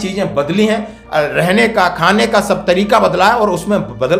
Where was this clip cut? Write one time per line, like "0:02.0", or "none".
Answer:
none